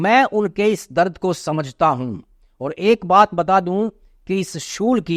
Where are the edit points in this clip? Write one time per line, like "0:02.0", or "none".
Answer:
none